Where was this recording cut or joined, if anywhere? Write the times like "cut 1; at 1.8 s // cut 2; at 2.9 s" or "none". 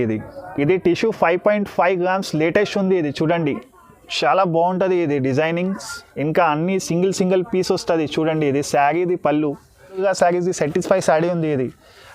cut 1; at 10.0 s